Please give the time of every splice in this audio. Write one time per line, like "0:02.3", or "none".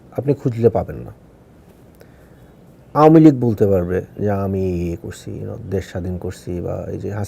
0:02.2